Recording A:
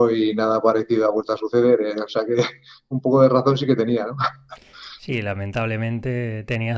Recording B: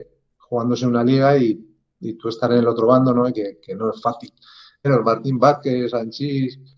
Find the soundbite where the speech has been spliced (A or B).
B